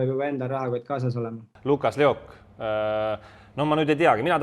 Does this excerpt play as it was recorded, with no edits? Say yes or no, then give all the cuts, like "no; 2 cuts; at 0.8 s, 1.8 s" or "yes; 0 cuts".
no; 1 cut; at 1.4 s